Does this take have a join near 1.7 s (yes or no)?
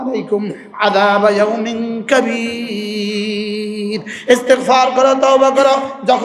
no